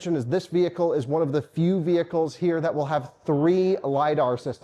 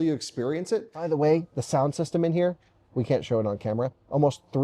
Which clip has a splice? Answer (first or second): second